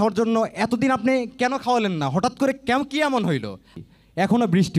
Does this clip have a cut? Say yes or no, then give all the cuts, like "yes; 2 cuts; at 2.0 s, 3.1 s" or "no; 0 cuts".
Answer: yes; 1 cut; at 3.7 s